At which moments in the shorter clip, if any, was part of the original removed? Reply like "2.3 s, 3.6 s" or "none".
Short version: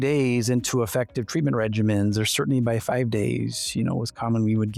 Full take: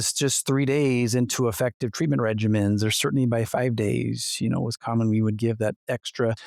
none